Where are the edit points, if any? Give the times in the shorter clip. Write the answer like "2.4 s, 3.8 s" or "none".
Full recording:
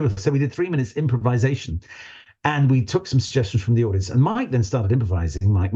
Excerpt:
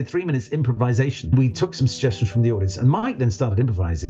1.3 s